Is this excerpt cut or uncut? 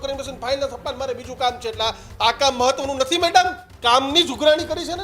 cut